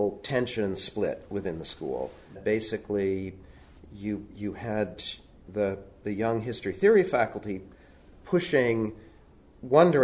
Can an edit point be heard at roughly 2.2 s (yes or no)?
no